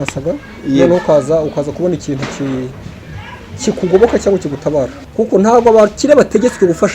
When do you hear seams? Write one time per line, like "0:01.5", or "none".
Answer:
0:05.0